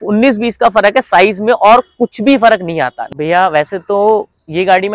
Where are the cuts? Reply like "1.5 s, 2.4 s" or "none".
3.0 s